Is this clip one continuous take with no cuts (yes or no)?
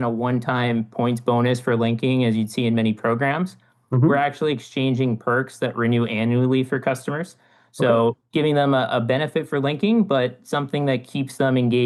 yes